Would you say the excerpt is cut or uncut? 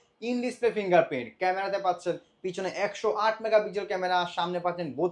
uncut